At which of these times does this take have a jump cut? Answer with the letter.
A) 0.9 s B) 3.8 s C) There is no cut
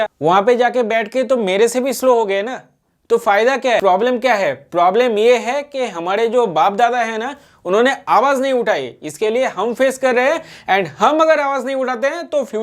B